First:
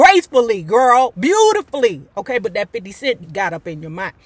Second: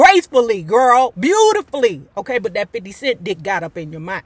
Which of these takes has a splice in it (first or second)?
first